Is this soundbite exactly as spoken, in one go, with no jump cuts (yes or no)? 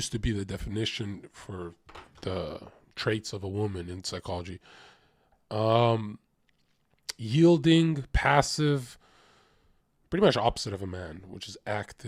yes